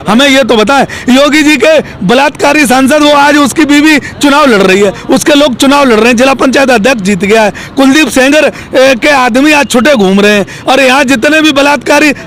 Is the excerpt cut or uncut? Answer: uncut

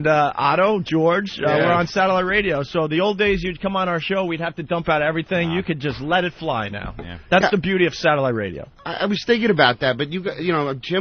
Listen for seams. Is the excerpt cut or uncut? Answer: cut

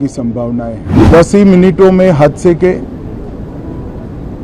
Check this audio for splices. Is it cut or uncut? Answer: cut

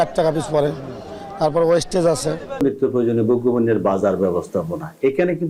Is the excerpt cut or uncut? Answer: cut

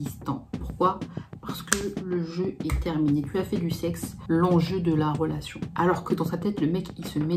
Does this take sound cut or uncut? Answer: cut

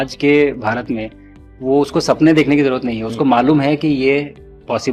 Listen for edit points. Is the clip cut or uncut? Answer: uncut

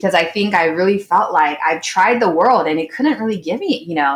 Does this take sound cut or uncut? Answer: uncut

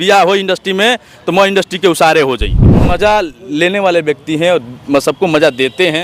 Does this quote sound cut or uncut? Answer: cut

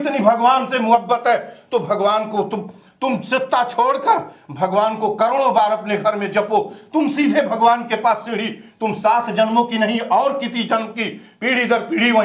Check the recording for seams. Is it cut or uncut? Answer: uncut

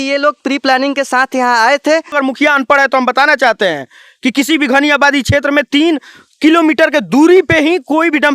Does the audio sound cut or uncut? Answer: cut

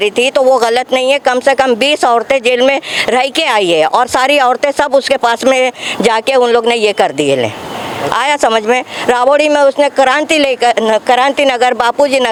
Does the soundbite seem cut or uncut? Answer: uncut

